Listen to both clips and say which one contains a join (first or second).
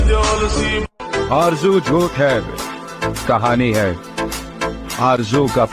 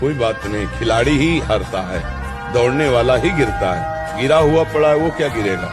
first